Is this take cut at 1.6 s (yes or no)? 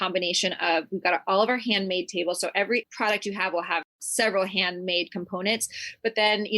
no